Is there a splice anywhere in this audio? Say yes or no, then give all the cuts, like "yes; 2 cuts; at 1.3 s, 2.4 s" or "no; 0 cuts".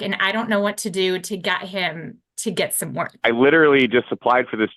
yes; 1 cut; at 3.2 s